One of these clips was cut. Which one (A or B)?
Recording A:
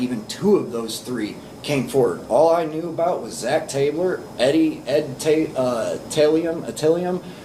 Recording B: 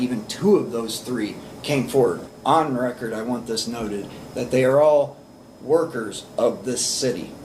B